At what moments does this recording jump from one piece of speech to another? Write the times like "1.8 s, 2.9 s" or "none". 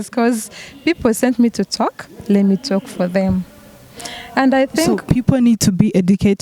5.0 s